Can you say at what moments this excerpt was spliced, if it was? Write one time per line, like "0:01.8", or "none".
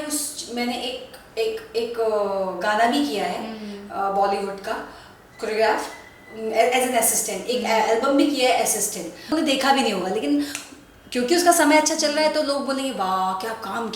0:09.3